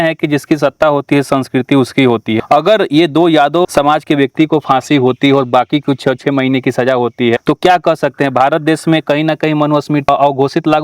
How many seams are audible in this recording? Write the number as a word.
four